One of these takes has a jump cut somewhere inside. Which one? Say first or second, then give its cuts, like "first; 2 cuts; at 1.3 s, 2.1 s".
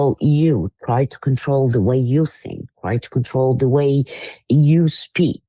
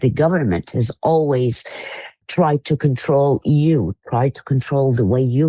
second; 1 cut; at 2.1 s